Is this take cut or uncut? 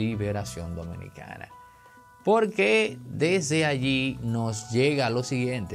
uncut